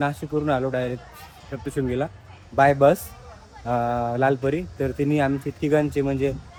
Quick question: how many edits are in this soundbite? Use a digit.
0